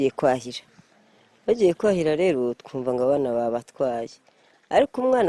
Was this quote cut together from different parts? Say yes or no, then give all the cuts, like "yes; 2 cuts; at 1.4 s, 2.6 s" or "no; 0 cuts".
no; 0 cuts